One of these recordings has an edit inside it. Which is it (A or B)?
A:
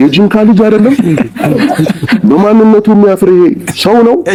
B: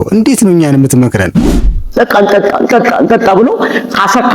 B